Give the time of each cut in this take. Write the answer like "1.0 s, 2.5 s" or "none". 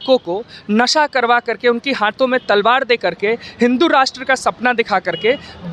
none